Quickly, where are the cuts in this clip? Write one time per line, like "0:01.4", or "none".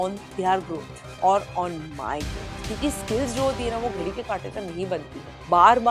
0:02.6